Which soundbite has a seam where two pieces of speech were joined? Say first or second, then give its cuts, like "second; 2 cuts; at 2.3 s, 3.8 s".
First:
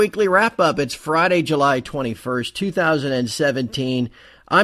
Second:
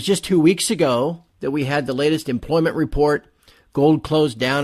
second; 1 cut; at 2.9 s